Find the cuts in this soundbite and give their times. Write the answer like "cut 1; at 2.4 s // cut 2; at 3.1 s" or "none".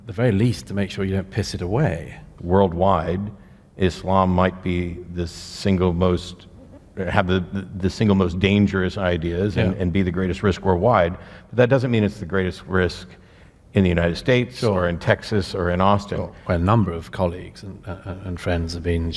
cut 1; at 2.3 s // cut 2; at 16.4 s